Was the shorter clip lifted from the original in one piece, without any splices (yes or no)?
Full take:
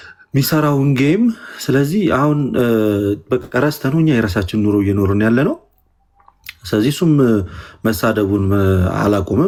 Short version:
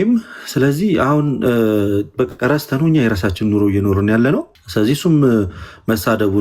no